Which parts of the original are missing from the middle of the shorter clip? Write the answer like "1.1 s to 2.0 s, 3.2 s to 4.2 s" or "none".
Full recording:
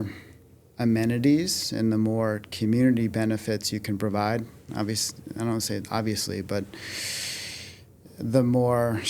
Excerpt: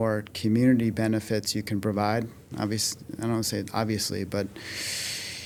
none